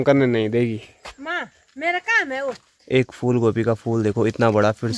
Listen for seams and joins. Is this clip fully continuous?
no; 1 cut; at 2.7 s

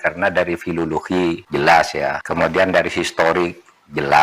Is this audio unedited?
no; 2 cuts; at 1.4 s, 2.2 s

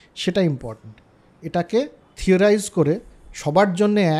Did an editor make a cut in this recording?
no; 0 cuts

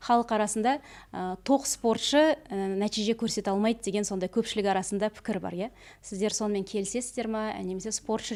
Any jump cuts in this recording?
no; 0 cuts

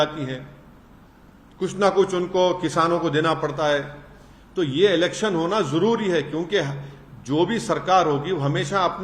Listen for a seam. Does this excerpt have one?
no; 0 cuts

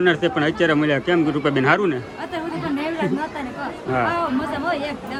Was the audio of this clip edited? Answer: no; 0 cuts

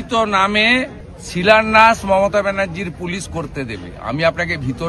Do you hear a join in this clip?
yes; 1 cut; at 1.0 s

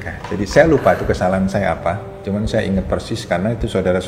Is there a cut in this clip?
yes; 1 cut; at 2.1 s

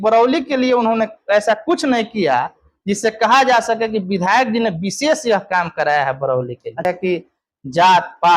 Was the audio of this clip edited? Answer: yes; 1 cut; at 6.8 s

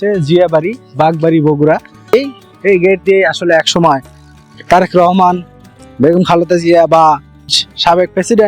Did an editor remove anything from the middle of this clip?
yes; 2 cuts; at 2.1 s, 7.6 s

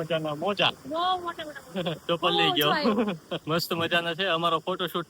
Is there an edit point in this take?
yes; 1 cut; at 2.0 s

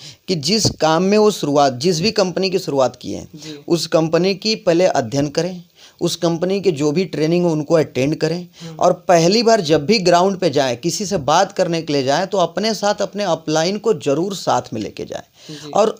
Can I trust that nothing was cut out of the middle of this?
yes; 0 cuts

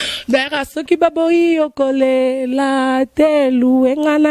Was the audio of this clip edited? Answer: no; 0 cuts

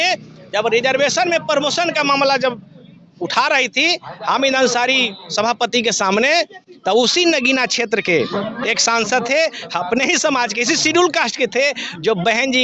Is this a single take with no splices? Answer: yes; 0 cuts

